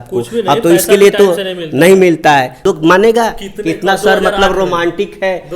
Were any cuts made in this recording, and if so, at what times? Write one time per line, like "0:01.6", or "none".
0:02.6